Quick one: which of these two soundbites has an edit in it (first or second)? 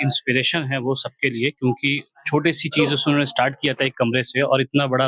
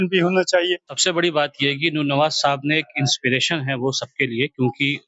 second